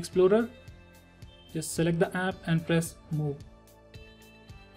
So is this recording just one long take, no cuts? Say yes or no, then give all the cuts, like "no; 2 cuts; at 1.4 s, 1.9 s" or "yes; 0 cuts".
yes; 0 cuts